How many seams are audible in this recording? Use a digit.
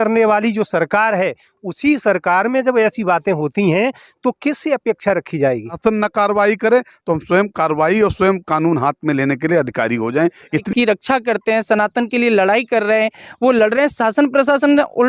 2